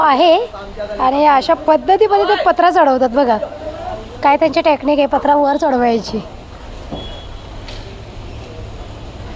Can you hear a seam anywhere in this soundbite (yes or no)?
no